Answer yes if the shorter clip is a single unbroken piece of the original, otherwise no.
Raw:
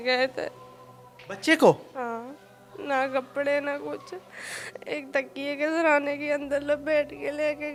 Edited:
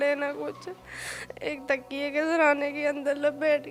yes